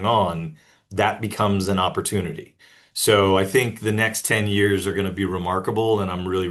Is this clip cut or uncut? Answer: uncut